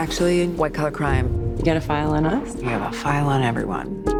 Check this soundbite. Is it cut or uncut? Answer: uncut